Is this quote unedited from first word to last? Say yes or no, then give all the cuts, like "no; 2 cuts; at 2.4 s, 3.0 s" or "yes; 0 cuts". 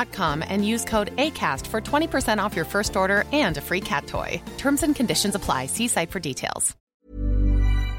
no; 1 cut; at 6.8 s